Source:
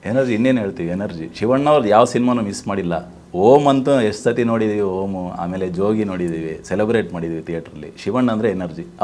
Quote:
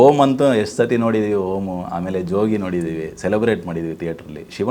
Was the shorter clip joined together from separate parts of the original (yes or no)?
no